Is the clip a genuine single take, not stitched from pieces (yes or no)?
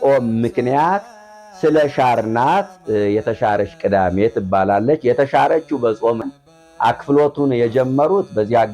no